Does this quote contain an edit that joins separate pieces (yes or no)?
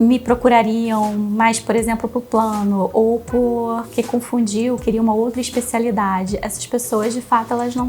no